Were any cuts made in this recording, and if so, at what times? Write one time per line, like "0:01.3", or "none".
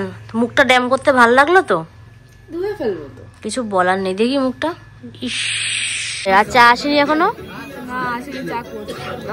0:06.3